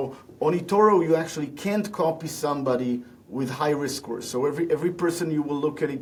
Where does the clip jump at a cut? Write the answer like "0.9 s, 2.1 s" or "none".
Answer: none